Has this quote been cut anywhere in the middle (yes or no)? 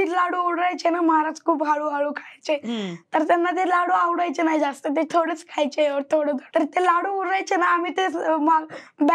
no